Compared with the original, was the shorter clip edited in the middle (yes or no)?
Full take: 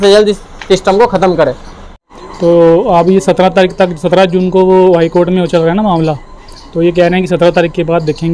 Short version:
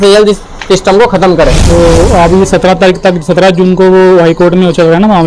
yes